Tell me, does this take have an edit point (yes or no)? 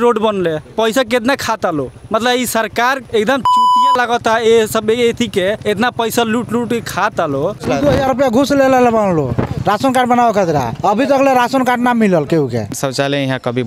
yes